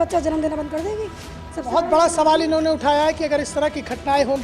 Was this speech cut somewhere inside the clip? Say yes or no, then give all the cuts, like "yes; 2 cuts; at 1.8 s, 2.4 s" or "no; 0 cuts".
no; 0 cuts